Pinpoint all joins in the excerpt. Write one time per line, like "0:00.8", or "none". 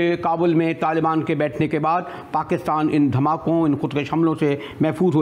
none